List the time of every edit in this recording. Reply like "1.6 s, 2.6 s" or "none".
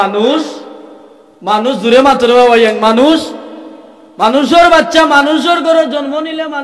none